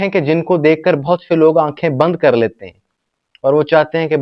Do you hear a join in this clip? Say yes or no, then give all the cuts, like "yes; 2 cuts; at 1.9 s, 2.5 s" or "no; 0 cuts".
no; 0 cuts